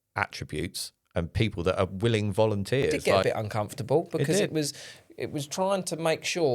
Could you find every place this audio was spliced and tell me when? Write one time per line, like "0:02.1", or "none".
0:03.2